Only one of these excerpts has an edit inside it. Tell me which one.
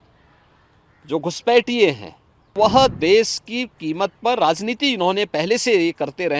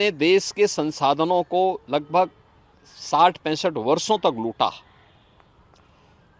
first; 1 cut; at 2.6 s

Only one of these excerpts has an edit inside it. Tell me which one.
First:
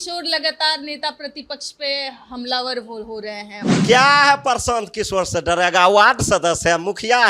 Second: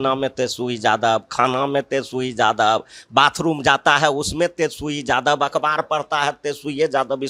first; 1 cut; at 3.7 s

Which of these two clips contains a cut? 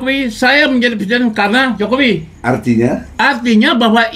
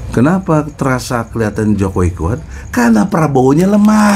first; 1 cut; at 2.3 s

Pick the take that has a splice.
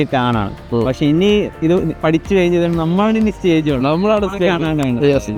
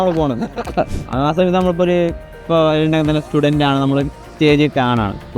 second; 1 cut; at 0.9 s

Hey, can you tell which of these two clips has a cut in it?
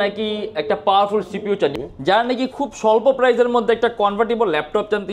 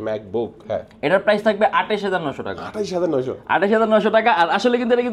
first; 1 cut; at 1.7 s

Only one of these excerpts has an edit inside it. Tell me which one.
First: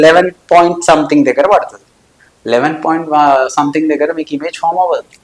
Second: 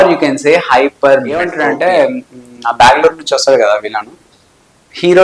second; 1 cut; at 1.5 s

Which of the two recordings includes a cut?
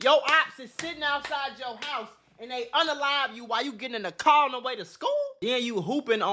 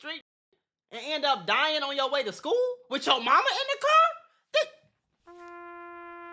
first; 1 cut; at 5.3 s

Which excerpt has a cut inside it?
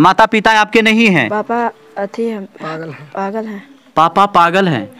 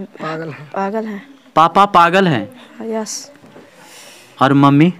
first; 1 cut; at 1.3 s

